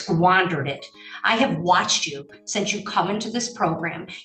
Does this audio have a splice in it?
no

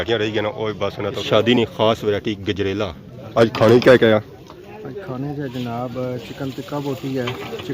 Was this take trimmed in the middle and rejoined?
yes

